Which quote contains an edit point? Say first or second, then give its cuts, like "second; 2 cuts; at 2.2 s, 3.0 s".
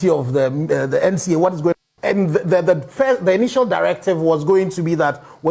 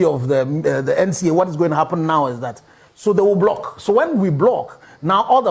first; 1 cut; at 1.6 s